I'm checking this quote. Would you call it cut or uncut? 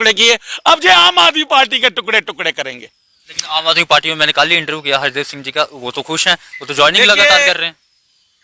uncut